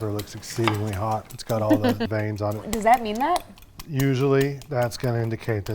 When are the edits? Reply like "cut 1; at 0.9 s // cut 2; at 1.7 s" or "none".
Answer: cut 1; at 2.6 s